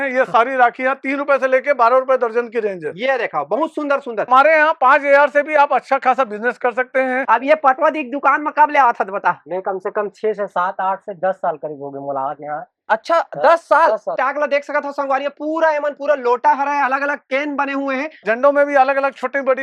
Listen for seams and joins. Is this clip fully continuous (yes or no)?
no